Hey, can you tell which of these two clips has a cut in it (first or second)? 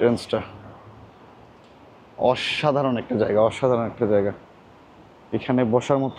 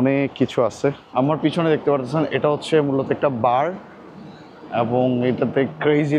second